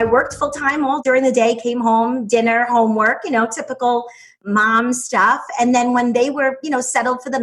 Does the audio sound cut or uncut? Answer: cut